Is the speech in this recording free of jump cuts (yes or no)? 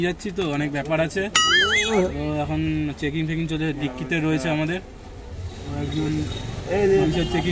yes